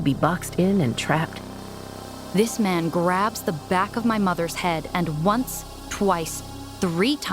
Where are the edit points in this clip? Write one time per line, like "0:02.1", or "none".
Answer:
0:02.0